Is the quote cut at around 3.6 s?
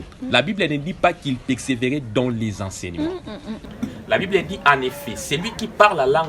yes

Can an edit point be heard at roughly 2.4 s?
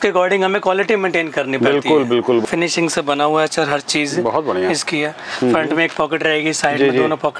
yes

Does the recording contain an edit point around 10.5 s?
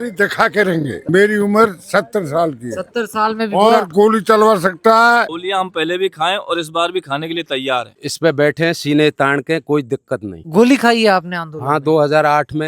yes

